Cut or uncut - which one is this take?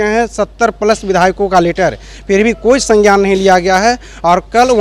uncut